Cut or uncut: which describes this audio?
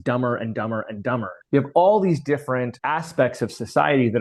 cut